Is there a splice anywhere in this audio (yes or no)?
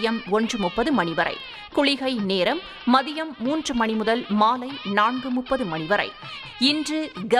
yes